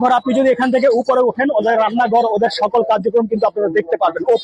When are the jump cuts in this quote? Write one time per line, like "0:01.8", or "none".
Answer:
none